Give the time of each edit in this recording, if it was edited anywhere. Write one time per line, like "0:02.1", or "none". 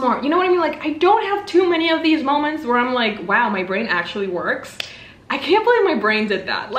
none